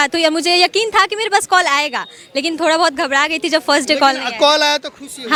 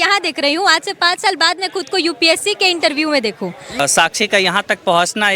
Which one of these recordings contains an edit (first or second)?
second